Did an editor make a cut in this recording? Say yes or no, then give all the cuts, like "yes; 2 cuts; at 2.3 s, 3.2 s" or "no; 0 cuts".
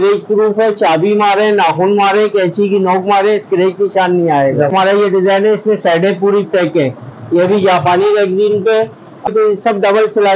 yes; 2 cuts; at 4.7 s, 9.3 s